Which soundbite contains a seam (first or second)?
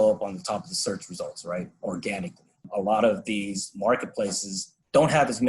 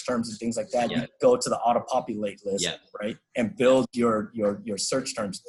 first